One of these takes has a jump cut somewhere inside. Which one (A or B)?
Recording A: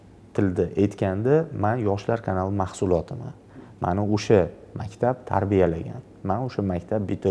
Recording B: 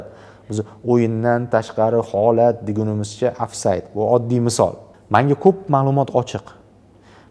B